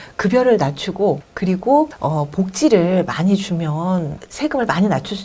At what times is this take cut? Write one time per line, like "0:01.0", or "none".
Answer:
0:01.3
0:02.0
0:04.2